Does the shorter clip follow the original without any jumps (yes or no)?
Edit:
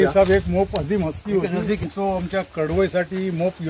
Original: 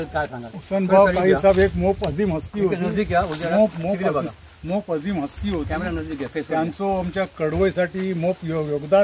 no